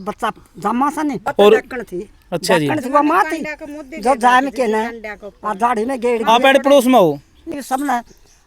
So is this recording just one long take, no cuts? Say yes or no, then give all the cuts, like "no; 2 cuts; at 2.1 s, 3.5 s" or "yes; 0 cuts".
no; 2 cuts; at 1.2 s, 7.5 s